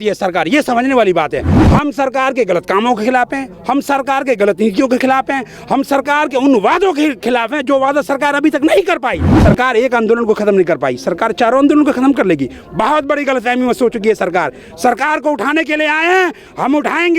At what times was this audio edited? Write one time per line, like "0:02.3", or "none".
0:01.6
0:09.3